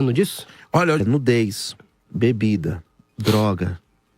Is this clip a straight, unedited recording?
no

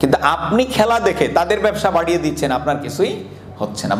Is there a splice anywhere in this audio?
no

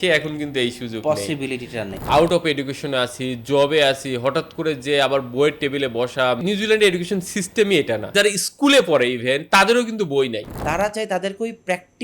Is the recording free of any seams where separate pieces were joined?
no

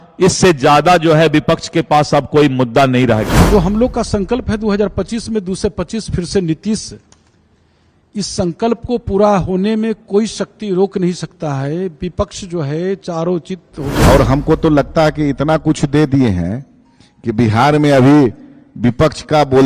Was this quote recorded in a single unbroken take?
no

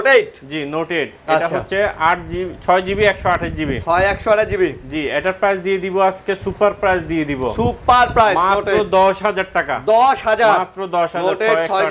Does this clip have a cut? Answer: no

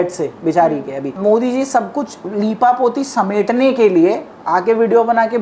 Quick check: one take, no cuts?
no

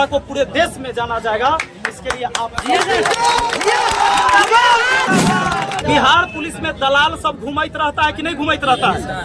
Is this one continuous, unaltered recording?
no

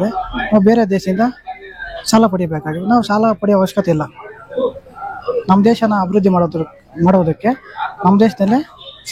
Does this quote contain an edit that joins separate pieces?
no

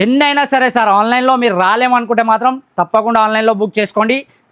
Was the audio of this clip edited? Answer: no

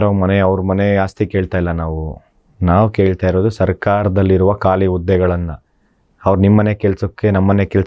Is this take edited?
no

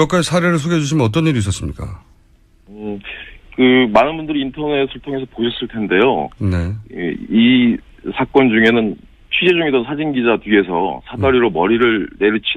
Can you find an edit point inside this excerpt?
no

